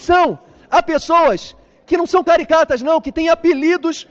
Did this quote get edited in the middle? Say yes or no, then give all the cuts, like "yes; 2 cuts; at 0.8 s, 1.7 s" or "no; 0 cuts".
no; 0 cuts